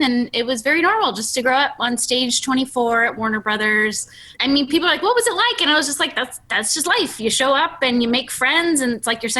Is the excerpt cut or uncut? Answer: cut